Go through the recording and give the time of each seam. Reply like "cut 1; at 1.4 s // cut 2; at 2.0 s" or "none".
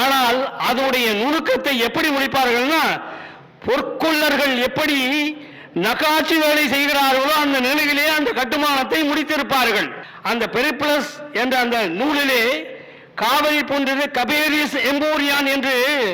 cut 1; at 10.0 s